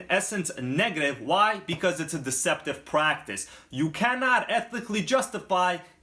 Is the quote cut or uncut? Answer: uncut